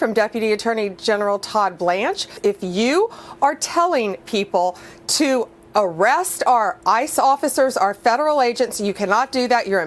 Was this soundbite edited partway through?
yes; 1 cut; at 2.4 s

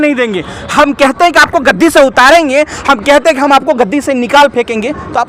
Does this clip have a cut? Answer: no; 0 cuts

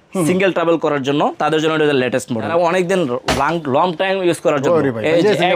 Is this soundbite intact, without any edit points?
no; 1 cut; at 2.5 s

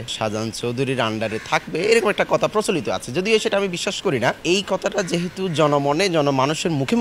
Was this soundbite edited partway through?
no; 0 cuts

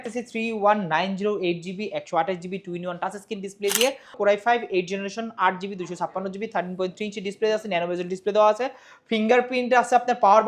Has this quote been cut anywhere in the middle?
yes; 1 cut; at 4.2 s

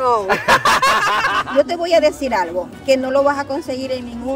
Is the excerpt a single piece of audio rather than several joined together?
no; 1 cut; at 1.4 s

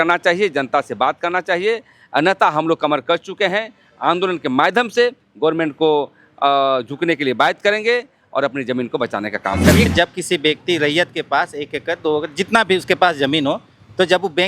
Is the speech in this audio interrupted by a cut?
yes; 1 cut; at 9.9 s

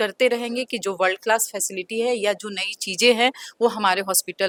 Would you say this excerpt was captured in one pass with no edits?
yes; 0 cuts

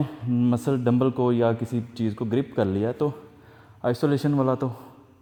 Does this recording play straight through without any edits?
yes; 0 cuts

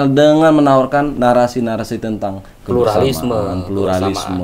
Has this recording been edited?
no; 0 cuts

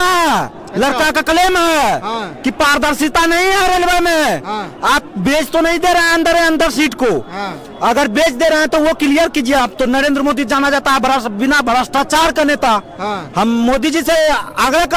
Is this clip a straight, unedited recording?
yes; 0 cuts

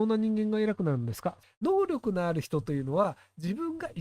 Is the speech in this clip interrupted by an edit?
yes; 1 cut; at 1.4 s

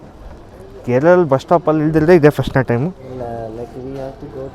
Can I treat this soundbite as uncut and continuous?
no; 1 cut; at 3.0 s

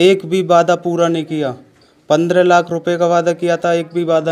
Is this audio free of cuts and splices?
yes; 0 cuts

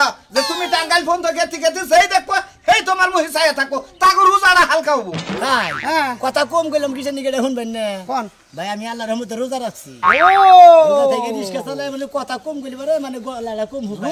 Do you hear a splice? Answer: yes; 1 cut; at 5.4 s

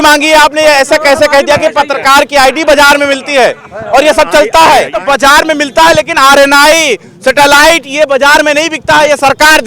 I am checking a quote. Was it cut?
yes; 1 cut; at 5.0 s

